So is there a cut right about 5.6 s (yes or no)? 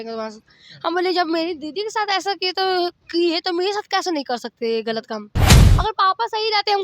yes